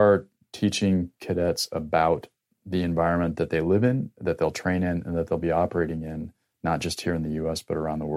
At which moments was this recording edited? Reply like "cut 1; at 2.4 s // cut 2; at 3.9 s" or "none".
none